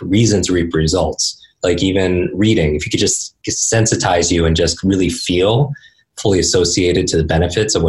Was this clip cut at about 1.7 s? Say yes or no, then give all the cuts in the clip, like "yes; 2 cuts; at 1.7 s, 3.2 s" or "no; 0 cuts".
no; 0 cuts